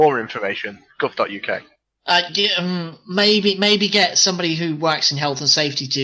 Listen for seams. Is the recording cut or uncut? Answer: uncut